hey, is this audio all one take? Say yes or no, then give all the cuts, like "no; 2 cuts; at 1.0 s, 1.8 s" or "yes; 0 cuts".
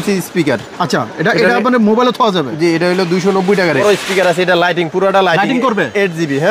no; 1 cut; at 3.8 s